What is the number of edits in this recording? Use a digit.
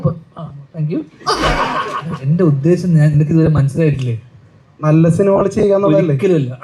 1